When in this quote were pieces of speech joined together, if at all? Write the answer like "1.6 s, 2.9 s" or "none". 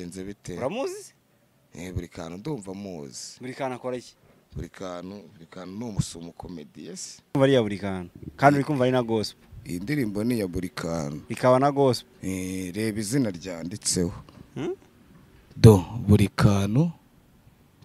7.4 s